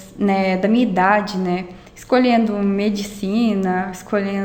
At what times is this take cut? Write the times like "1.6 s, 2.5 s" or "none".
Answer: none